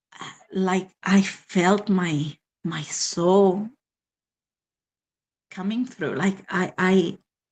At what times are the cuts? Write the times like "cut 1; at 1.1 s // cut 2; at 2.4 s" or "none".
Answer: none